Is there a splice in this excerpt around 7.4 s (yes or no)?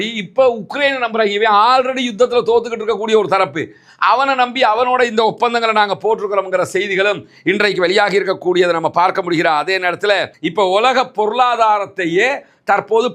no